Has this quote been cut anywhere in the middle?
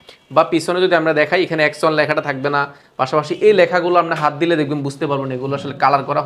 no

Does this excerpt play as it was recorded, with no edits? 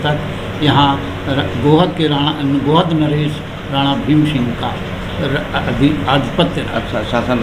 yes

